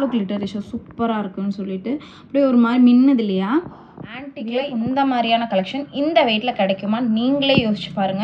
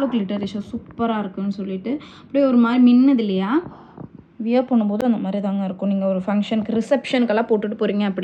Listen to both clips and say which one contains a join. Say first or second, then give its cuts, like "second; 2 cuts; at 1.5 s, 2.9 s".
first; 1 cut; at 4.4 s